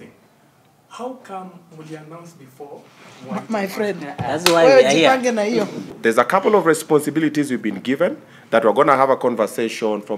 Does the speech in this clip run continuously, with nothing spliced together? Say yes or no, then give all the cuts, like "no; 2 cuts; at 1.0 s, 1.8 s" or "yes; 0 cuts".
no; 1 cut; at 5.9 s